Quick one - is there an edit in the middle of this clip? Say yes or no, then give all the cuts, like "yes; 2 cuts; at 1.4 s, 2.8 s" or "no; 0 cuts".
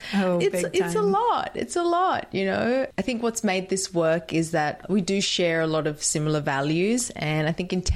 no; 0 cuts